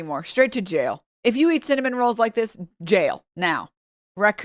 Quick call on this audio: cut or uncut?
uncut